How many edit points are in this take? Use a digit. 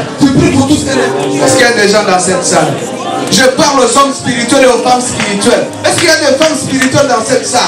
1